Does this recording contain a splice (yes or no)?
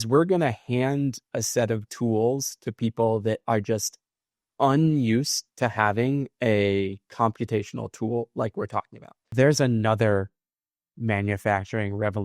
yes